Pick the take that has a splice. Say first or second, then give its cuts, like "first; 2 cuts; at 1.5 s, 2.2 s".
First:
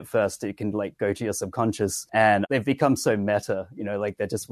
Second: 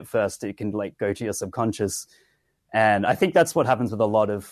first; 1 cut; at 2.3 s